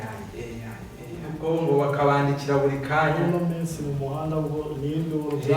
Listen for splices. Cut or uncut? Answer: cut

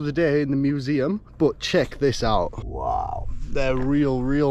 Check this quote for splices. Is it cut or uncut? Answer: cut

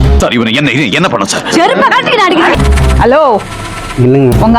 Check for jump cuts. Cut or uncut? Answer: cut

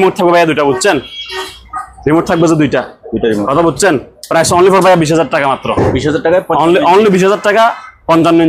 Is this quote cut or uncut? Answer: uncut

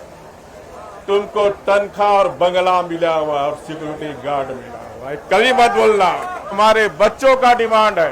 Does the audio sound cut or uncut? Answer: cut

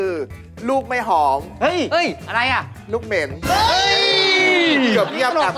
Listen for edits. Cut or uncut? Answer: uncut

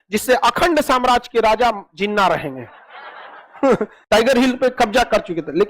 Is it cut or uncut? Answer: cut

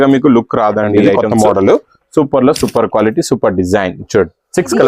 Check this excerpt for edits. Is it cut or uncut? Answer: cut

